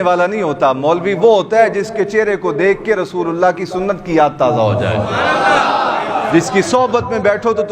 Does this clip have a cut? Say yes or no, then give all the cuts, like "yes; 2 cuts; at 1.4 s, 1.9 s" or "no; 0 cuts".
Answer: no; 0 cuts